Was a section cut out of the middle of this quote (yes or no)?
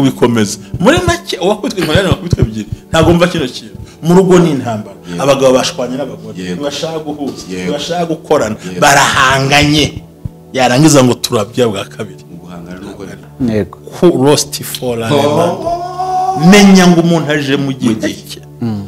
yes